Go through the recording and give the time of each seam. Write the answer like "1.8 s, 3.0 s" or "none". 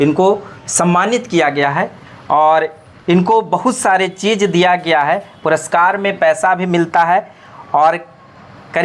none